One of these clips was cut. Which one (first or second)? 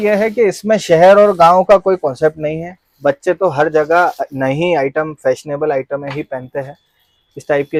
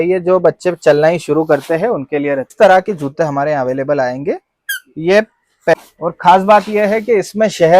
second